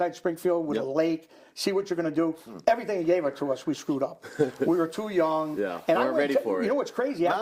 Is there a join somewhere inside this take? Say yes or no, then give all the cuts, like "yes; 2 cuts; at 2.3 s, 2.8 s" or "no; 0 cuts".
no; 0 cuts